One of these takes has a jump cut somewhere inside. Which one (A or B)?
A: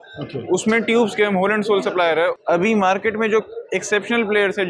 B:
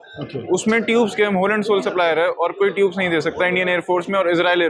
A